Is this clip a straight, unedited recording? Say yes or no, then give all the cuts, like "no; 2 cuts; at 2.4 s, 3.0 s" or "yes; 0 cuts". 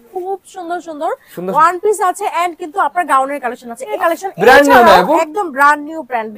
no; 1 cut; at 3.9 s